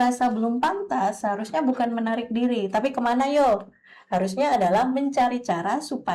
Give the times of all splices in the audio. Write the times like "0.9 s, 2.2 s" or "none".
none

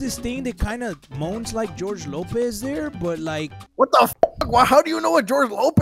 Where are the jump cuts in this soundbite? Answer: none

